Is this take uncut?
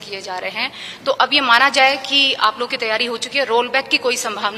yes; 0 cuts

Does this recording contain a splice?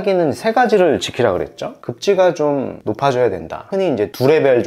no; 0 cuts

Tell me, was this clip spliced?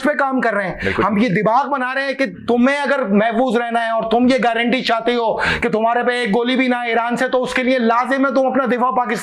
no; 0 cuts

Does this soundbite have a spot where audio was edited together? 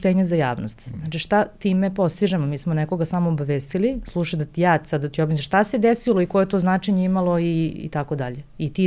no; 0 cuts

